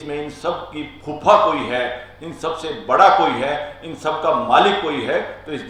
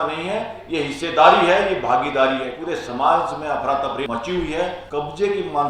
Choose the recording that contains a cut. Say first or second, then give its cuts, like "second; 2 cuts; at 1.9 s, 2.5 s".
second; 3 cuts; at 2.6 s, 4.1 s, 4.8 s